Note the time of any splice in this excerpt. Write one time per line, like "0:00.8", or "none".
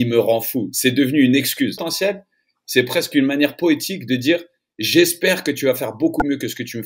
0:01.9